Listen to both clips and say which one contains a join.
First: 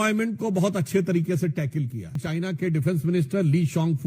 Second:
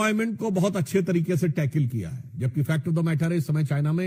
first; 1 cut; at 2.2 s

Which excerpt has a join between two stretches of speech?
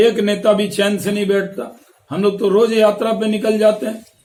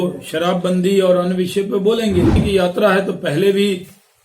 second; 1 cut; at 2.4 s

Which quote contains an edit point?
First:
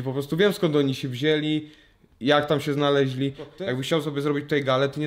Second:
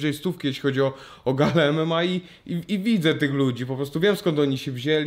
first; 1 cut; at 3.5 s

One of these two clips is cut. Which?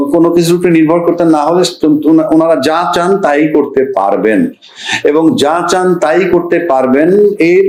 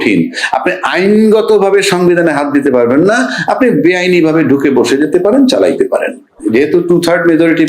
second; 1 cut; at 6.4 s

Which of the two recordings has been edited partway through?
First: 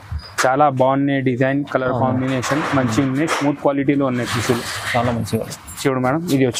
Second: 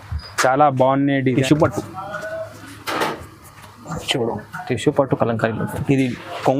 second; 1 cut; at 1.4 s

